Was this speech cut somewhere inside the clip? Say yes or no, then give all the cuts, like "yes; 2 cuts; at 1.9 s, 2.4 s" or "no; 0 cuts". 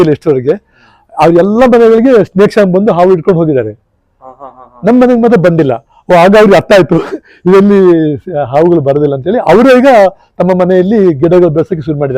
no; 0 cuts